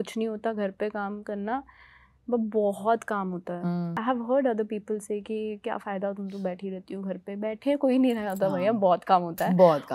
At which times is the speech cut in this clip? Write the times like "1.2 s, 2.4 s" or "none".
4.0 s